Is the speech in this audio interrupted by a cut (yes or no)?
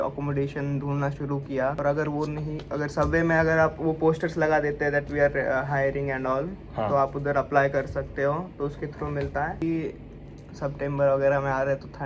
yes